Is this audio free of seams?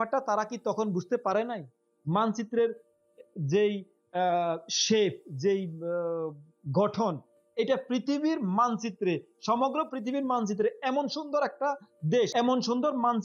no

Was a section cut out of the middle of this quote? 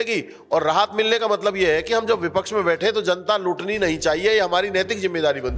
no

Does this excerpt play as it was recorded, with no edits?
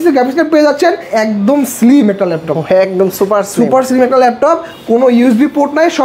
no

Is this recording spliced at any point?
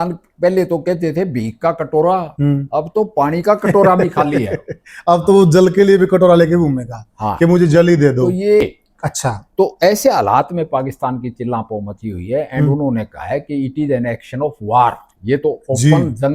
yes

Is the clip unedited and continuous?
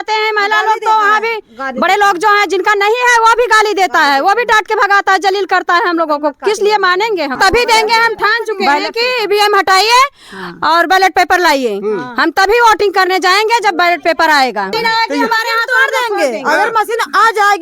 no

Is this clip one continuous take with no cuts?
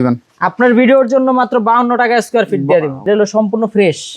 no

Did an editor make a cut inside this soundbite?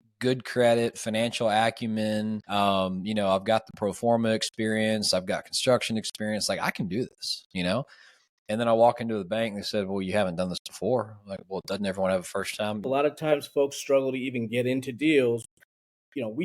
yes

